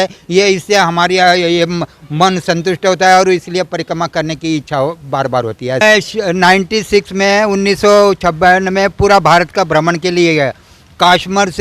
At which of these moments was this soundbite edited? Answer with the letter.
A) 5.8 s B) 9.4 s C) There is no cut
A